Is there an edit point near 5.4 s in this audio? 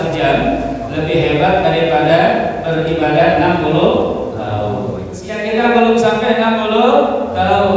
yes; 1 cut; at 5.4 s

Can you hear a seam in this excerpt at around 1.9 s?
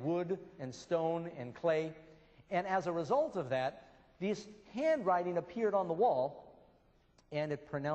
yes; 1 cut; at 1.9 s

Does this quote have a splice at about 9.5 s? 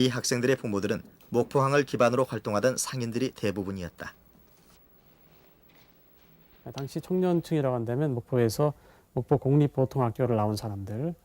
yes; 1 cut; at 9.5 s

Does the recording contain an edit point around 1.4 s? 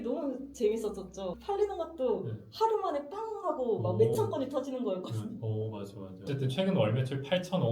yes; 2 cuts; at 1.4 s, 6.3 s

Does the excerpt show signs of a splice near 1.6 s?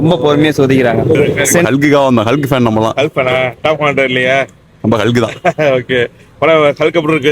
yes; 1 cut; at 1.6 s

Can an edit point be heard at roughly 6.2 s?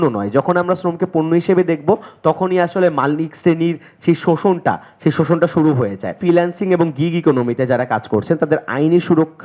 yes; 1 cut; at 6.2 s

